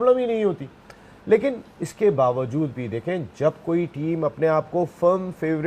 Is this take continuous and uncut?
yes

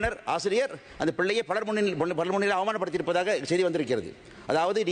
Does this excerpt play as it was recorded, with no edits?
yes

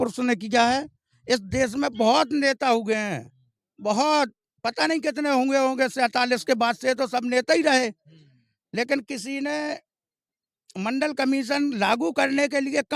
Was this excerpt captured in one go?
yes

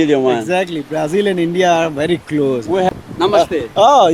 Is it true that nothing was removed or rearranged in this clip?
no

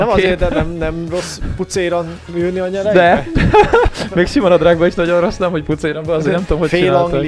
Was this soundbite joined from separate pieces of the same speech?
yes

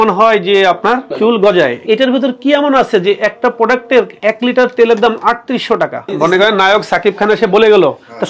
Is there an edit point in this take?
yes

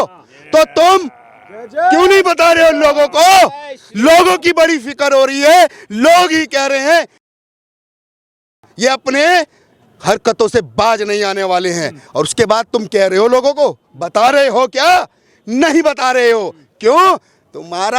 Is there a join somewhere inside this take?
no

